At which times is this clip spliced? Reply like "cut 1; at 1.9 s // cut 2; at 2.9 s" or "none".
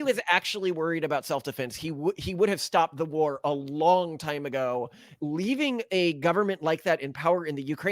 cut 1; at 5.0 s